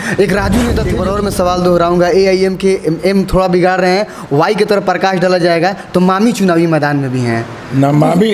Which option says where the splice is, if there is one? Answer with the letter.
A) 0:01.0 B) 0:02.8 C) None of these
A